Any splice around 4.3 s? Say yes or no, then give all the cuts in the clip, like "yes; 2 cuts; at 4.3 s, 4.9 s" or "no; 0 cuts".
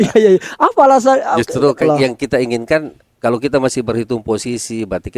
no; 1 cut; at 1.8 s